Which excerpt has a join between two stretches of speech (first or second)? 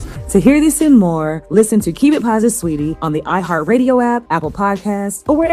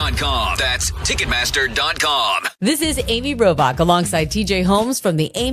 second